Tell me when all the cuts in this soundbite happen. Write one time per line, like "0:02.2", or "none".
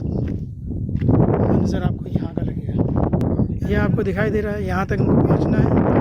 0:03.2